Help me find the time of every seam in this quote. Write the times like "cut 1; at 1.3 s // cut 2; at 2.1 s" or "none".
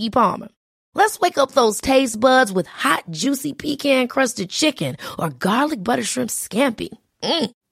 none